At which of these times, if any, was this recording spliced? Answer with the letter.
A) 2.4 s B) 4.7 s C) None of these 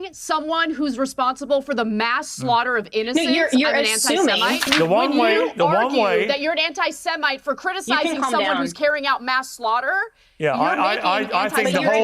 B